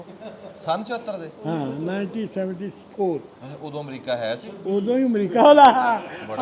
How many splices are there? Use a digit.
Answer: 0